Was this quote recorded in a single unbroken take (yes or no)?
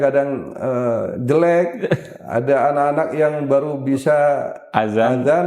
yes